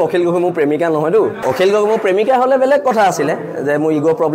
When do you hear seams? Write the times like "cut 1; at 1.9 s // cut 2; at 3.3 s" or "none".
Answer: cut 1; at 1.4 s

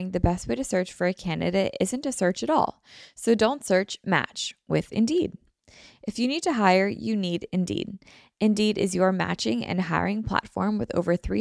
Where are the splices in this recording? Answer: none

